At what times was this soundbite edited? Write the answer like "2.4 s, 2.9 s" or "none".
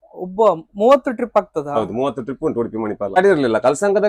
3.2 s